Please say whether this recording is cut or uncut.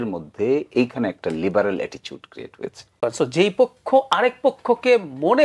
cut